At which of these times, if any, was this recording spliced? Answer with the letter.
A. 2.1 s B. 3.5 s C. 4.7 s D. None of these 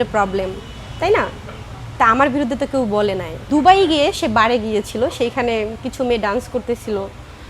B